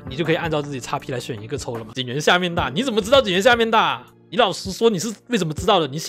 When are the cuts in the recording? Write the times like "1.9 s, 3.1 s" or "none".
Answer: 1.9 s